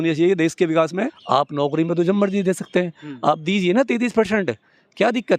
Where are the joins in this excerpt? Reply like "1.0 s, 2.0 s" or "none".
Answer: 1.2 s